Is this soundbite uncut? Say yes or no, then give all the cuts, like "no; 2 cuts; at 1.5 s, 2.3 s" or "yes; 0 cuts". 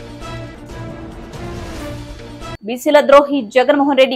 no; 1 cut; at 2.6 s